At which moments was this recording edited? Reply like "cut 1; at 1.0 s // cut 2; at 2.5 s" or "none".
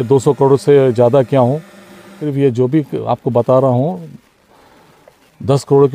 cut 1; at 2.2 s